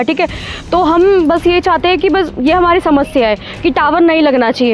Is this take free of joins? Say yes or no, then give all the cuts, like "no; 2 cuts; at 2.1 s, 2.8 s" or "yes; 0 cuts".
yes; 0 cuts